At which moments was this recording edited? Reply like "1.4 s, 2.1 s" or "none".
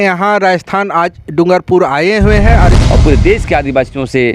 2.8 s